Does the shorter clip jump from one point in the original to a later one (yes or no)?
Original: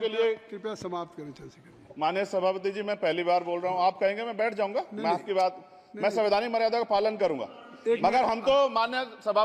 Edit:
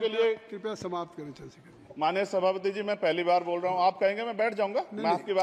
no